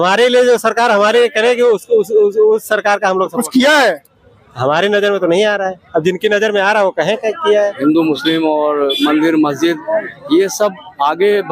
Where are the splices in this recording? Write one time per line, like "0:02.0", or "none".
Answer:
0:07.8